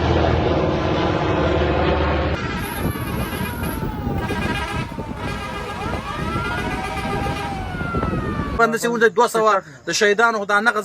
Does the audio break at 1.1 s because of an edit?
no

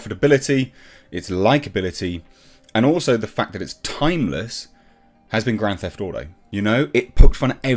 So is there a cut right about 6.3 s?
yes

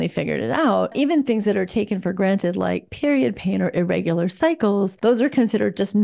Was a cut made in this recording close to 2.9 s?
no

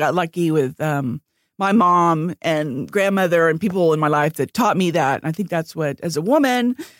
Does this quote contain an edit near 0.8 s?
no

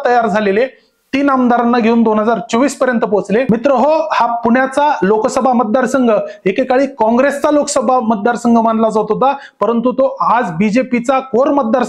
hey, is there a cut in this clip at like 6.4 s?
no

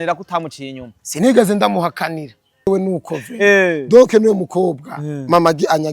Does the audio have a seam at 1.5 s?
no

